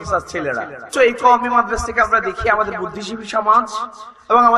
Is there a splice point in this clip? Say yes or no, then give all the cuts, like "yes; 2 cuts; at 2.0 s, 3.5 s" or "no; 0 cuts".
yes; 1 cut; at 0.9 s